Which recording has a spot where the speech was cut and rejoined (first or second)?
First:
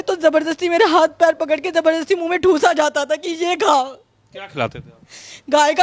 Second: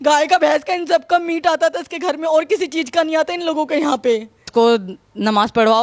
second